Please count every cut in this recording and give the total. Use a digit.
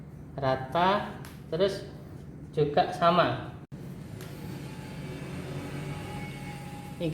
1